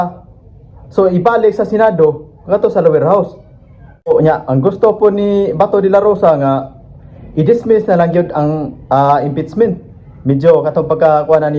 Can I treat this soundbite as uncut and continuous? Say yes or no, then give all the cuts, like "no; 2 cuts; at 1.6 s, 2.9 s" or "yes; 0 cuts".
no; 1 cut; at 4.1 s